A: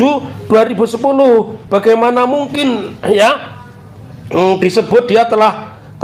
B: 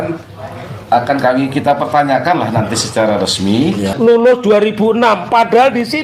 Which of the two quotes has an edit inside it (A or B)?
B